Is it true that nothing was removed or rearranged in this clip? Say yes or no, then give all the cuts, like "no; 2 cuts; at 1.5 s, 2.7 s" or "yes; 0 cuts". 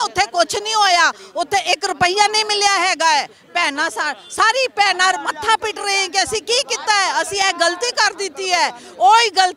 yes; 0 cuts